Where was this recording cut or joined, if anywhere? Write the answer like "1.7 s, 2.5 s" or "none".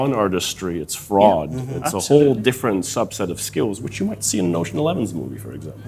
none

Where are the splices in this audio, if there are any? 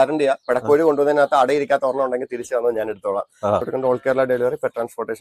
3.7 s

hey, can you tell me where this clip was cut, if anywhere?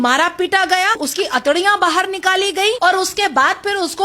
1.0 s, 2.8 s

